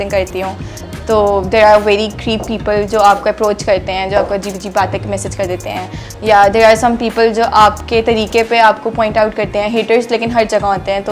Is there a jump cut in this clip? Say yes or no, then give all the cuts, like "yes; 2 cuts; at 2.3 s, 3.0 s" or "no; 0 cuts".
no; 0 cuts